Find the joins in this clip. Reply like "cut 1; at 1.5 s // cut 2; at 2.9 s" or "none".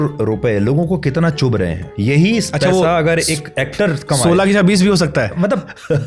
cut 1; at 1.9 s